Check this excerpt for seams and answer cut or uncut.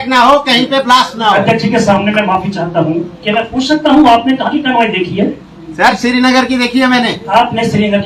uncut